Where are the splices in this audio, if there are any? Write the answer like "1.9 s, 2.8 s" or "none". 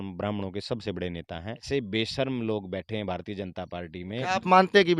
1.6 s, 4.2 s